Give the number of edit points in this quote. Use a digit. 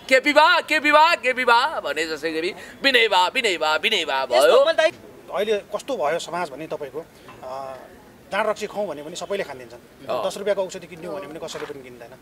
1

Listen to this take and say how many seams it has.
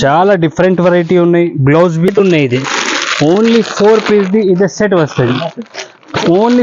1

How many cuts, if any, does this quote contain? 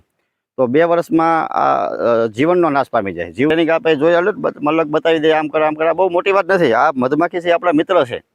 1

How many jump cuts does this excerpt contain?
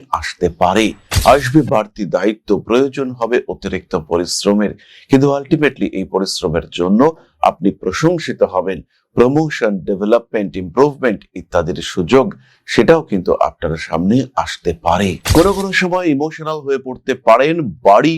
2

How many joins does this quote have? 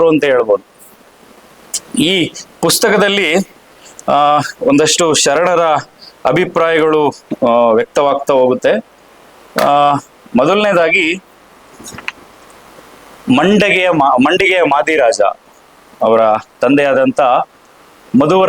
0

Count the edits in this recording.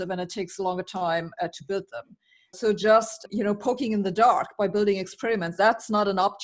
2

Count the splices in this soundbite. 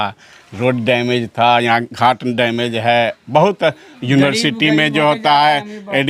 0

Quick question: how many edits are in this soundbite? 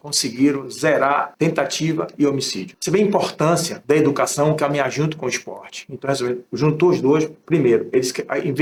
0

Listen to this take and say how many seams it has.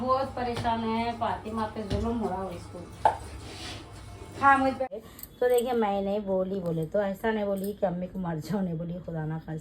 1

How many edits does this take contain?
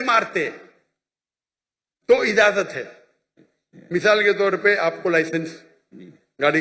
0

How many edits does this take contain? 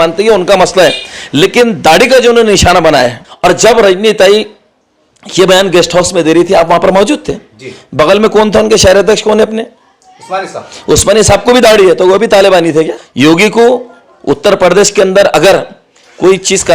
2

